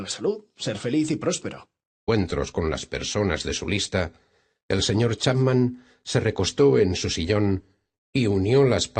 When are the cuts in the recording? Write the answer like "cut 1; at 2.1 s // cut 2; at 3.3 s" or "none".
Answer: none